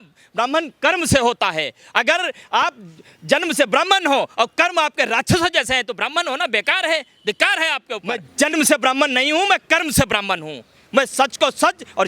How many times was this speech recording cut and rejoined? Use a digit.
1